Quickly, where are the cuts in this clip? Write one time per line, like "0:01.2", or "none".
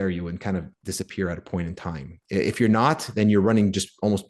none